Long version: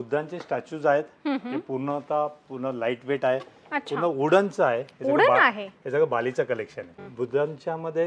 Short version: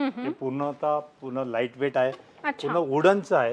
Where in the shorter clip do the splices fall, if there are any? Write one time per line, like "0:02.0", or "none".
none